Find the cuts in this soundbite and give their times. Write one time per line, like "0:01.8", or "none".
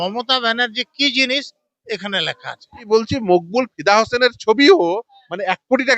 0:02.9